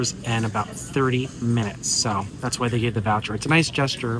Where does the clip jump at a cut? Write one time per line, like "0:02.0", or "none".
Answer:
none